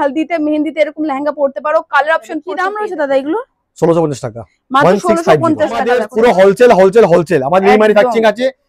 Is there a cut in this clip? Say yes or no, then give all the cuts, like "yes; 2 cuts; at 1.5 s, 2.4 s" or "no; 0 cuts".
yes; 2 cuts; at 2.5 s, 6.0 s